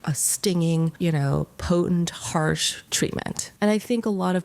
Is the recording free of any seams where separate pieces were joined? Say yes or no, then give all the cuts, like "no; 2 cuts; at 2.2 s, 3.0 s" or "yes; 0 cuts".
no; 2 cuts; at 0.9 s, 3.3 s